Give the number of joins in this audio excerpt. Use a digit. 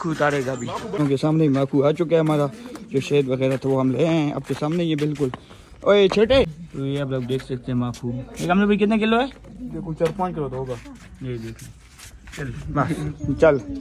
2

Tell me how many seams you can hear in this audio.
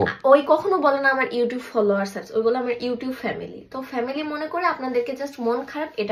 0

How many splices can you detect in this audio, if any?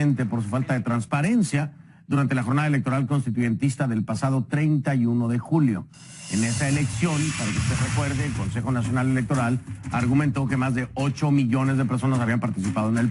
1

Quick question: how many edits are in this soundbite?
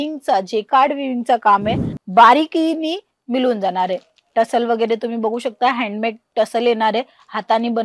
1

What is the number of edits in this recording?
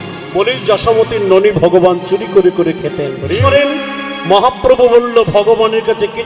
1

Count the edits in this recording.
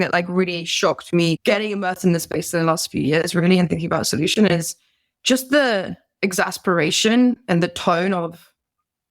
1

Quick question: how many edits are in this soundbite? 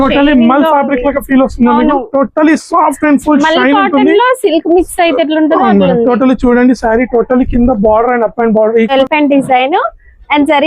1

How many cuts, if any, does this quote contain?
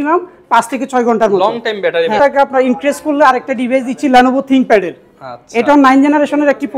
1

